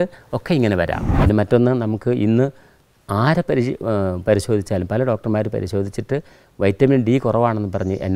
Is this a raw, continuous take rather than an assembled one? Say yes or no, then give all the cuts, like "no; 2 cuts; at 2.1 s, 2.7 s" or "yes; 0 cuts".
no; 1 cut; at 1.1 s